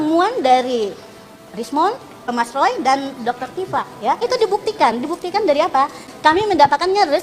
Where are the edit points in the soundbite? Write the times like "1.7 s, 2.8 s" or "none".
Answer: 2.3 s, 4.2 s, 6.1 s